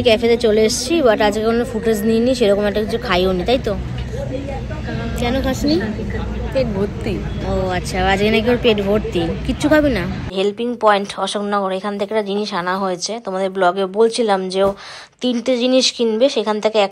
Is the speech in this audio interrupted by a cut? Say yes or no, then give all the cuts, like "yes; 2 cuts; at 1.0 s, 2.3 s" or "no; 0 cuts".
yes; 1 cut; at 10.3 s